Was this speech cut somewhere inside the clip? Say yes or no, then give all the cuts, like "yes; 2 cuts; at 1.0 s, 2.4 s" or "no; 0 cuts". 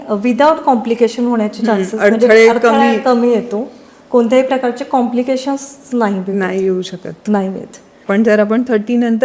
yes; 1 cut; at 7.9 s